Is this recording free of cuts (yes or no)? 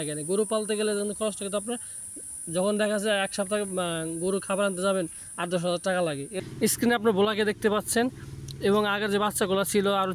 no